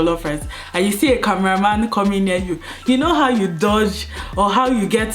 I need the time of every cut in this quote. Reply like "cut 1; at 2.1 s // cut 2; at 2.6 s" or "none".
none